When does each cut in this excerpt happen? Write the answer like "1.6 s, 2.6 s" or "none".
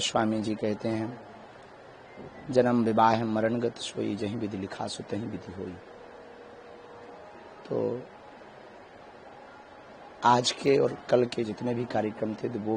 none